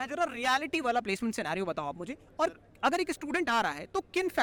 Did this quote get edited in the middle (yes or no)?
no